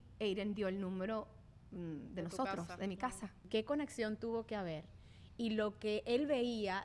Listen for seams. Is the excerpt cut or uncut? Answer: cut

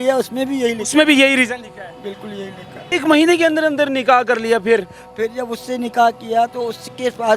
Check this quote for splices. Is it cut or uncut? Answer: cut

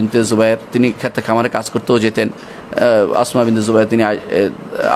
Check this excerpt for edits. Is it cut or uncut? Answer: uncut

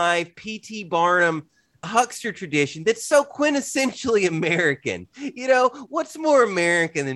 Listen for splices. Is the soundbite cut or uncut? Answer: cut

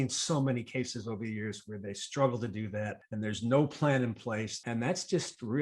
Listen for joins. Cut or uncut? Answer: cut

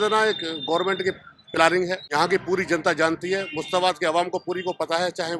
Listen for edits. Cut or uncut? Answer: cut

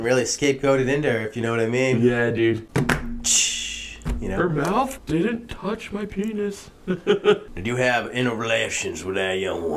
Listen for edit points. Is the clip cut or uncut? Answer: cut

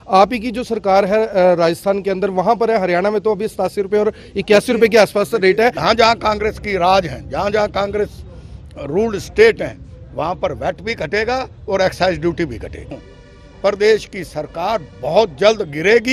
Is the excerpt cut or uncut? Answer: cut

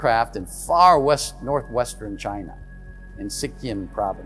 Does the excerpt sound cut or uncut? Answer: uncut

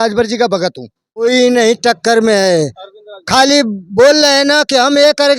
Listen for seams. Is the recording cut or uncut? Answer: cut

